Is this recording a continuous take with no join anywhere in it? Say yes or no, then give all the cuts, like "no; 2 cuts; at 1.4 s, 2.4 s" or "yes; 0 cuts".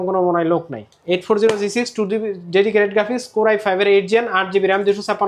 yes; 0 cuts